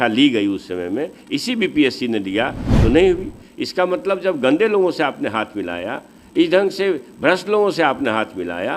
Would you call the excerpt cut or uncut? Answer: uncut